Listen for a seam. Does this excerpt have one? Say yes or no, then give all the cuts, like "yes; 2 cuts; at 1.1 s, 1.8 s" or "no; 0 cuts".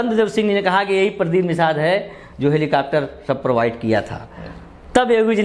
no; 0 cuts